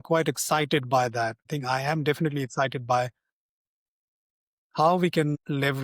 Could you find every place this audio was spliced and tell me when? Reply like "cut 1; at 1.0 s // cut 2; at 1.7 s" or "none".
cut 1; at 1.4 s